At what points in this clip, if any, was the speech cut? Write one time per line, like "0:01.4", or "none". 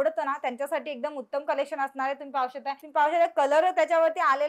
0:02.8